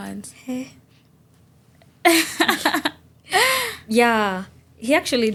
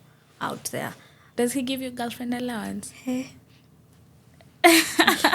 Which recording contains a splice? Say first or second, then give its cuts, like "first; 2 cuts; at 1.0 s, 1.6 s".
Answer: second; 1 cut; at 1.3 s